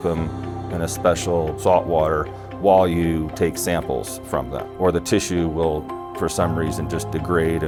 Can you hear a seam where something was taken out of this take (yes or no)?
no